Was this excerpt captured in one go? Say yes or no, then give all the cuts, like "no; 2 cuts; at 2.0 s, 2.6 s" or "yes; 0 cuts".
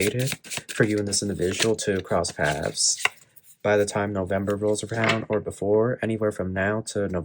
yes; 0 cuts